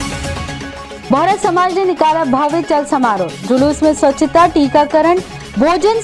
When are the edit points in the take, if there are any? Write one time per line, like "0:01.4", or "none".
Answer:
0:01.0